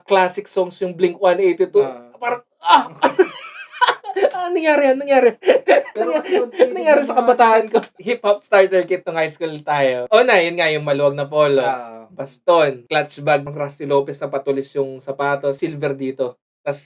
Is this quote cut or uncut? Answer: cut